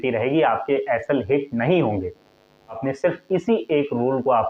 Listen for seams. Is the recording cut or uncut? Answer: cut